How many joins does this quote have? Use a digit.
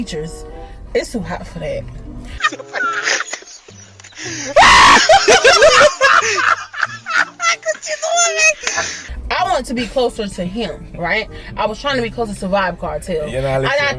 0